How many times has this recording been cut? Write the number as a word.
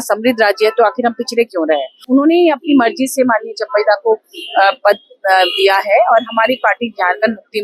one